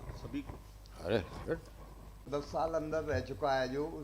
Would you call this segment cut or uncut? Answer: cut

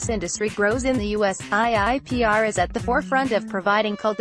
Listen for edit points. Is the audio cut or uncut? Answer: uncut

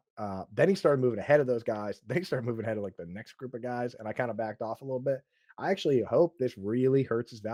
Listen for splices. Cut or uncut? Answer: uncut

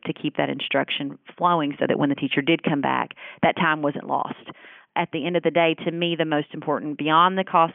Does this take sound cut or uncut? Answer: cut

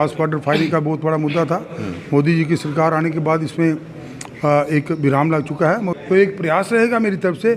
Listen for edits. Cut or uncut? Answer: cut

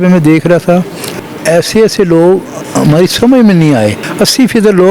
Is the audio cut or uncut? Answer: cut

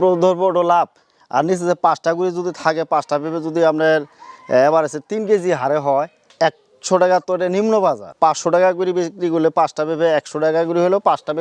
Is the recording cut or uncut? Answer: uncut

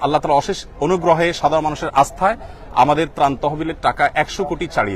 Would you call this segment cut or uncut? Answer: uncut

